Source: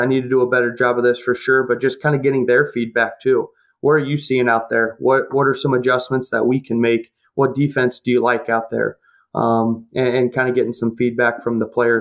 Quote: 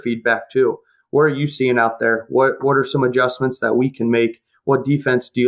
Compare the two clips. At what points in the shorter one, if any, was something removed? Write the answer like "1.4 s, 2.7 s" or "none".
none